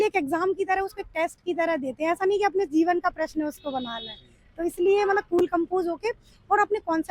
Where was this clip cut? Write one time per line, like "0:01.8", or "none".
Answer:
none